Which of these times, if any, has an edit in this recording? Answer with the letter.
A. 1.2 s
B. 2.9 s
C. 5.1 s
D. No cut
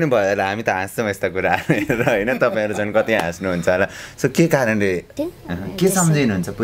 C